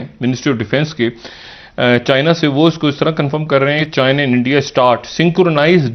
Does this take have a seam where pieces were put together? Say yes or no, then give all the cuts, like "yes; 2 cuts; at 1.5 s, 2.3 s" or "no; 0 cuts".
no; 0 cuts